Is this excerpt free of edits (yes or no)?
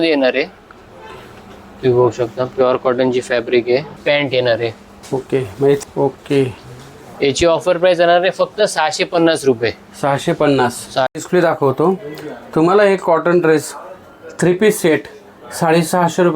no